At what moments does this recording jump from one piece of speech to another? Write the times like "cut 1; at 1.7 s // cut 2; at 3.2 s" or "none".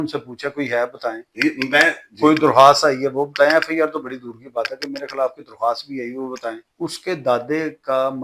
cut 1; at 6.7 s